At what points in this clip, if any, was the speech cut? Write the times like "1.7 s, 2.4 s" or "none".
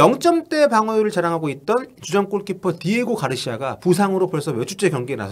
none